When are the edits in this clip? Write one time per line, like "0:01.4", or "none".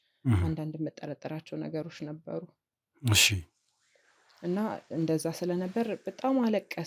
none

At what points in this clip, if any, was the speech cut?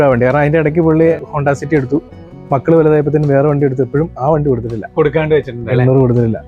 none

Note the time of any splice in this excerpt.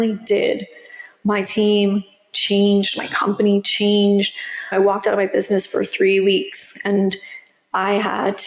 0:04.7

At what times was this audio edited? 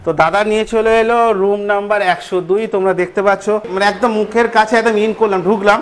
none

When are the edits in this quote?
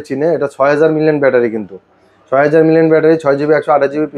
none

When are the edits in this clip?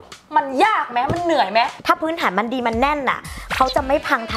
0:01.7

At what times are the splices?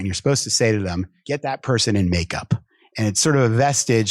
0:01.2

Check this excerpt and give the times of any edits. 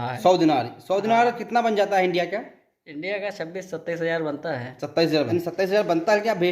0:05.3

